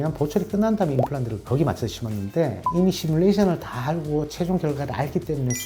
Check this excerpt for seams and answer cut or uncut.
uncut